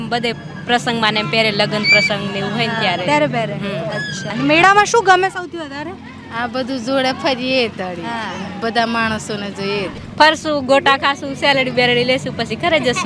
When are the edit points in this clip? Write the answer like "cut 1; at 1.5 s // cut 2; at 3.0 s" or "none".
cut 1; at 4.2 s // cut 2; at 10.0 s